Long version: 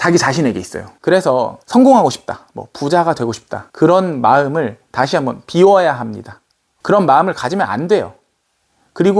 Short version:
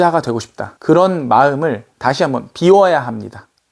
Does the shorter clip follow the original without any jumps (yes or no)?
yes